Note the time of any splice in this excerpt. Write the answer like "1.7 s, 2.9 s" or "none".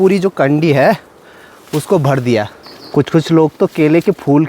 2.7 s